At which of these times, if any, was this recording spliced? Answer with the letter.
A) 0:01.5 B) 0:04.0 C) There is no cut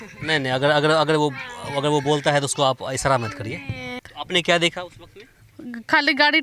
B